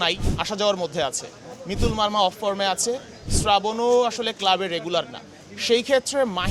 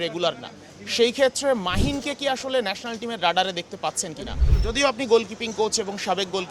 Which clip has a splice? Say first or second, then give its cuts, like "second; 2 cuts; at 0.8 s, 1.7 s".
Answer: second; 1 cut; at 4.4 s